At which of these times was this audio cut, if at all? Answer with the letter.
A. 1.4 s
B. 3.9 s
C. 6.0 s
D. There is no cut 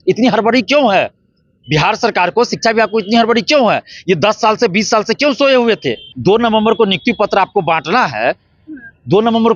C